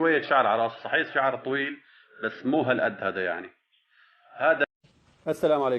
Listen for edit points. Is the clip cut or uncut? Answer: cut